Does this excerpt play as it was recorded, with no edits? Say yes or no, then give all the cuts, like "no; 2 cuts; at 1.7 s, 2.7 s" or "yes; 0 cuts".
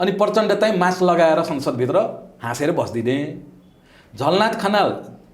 yes; 0 cuts